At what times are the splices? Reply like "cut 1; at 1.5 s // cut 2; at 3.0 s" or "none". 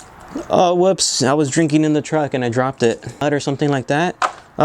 cut 1; at 3.2 s